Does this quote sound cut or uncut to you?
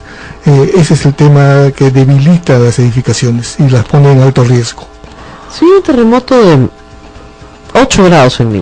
uncut